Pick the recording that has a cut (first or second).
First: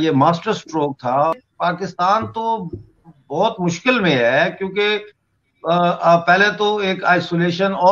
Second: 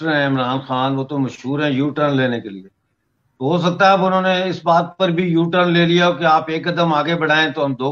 first